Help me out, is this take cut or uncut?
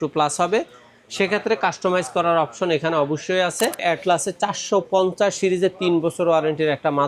cut